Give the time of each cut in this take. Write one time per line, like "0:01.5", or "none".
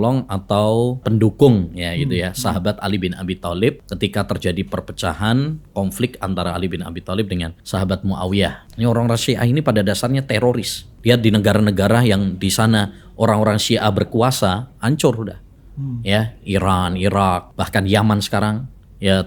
0:01.0
0:03.9
0:07.6
0:08.6
0:10.8
0:17.5